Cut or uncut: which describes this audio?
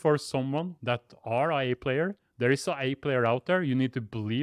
uncut